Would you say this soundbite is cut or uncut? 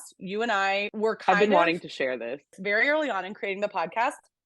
cut